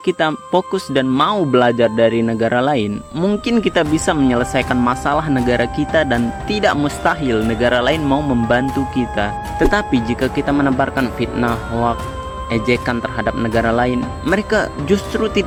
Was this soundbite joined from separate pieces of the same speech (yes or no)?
no